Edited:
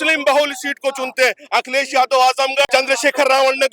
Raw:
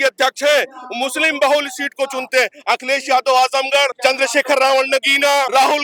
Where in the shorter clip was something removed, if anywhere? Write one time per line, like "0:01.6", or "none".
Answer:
0:02.7